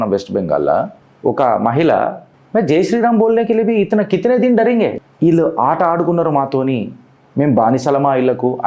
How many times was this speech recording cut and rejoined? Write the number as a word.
two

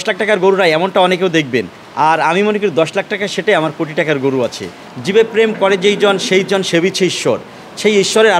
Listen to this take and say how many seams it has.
one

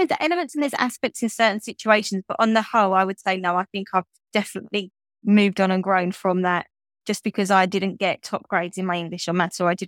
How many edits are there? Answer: zero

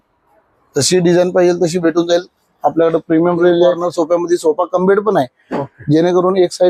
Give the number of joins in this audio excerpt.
one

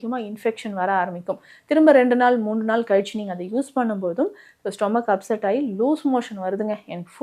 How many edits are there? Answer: zero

